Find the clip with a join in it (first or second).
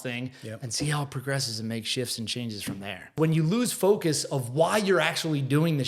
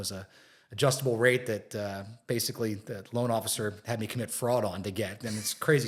first